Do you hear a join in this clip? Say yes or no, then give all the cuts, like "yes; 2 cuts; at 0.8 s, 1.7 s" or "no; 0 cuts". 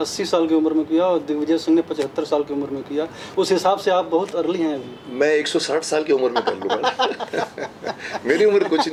no; 0 cuts